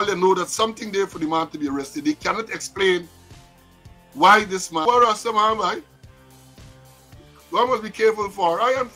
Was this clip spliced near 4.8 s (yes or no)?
yes